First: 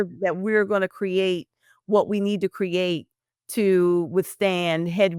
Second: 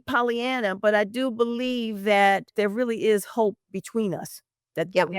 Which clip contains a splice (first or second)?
second